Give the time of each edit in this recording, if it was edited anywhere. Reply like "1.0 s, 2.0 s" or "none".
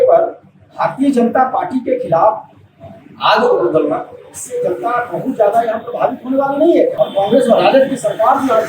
7.1 s

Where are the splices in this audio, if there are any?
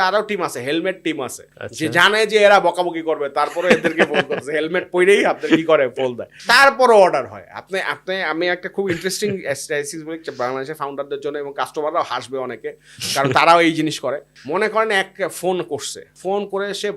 none

